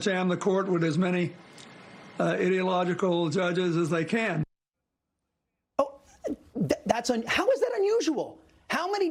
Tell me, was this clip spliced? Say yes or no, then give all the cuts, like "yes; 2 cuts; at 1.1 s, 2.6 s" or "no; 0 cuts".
no; 0 cuts